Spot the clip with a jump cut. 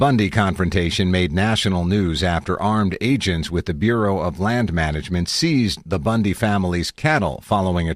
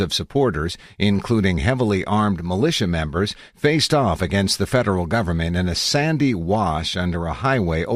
second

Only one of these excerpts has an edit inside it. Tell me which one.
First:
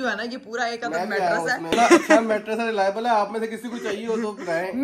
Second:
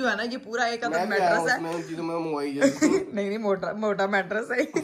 first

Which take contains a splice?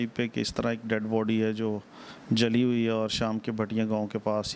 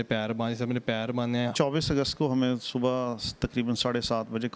second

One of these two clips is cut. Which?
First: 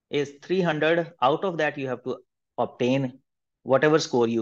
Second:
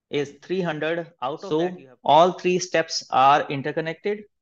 second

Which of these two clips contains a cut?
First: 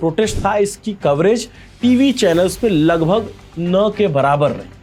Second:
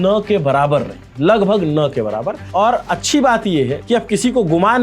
second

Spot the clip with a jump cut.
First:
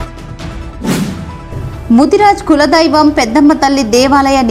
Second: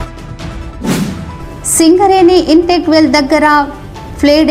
second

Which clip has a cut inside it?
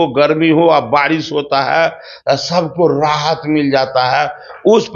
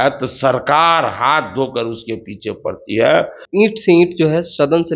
second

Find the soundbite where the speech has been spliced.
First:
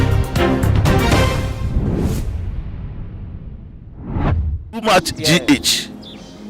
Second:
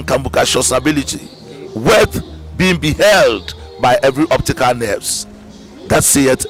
first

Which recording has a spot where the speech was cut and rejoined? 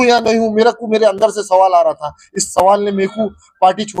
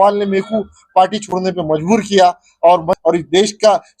second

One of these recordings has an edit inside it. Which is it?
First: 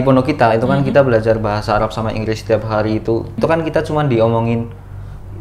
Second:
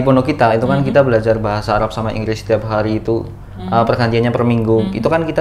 first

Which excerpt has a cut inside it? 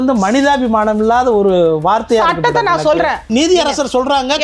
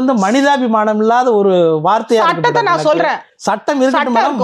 first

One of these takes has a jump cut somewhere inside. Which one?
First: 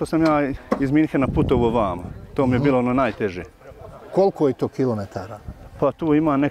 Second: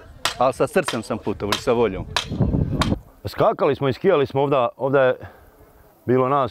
second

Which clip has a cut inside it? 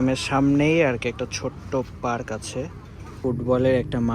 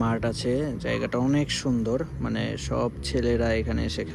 first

